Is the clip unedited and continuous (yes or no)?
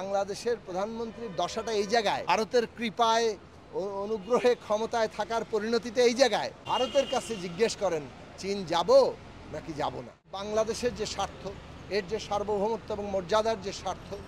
no